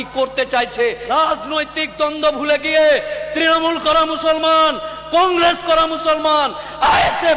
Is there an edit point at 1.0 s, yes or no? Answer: yes